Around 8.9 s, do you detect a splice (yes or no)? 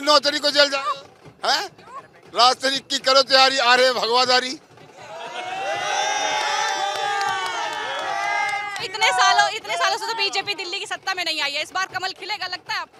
no